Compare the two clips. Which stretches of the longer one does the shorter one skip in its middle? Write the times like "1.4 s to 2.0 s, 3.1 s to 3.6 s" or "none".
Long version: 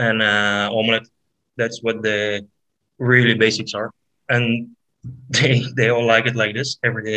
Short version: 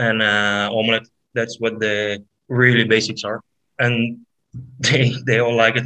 1.2 s to 1.4 s, 2.5 s to 2.8 s

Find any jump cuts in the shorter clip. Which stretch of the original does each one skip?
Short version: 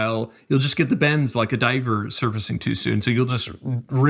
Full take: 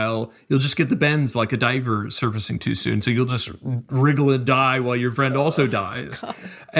none

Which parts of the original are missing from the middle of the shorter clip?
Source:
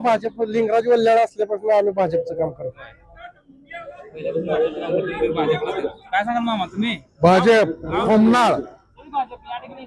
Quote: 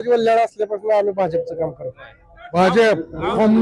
3.4 s to 7.3 s

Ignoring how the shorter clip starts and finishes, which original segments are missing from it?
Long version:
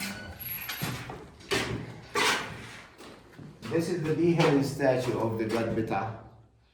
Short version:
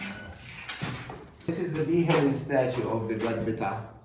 1.5 s to 3.8 s

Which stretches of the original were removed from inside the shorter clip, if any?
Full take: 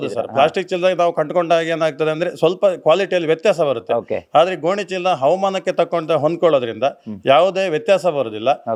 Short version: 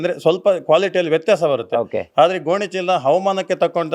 none

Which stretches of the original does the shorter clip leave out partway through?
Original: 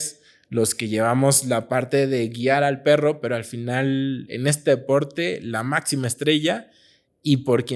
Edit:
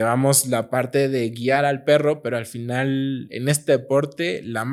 none

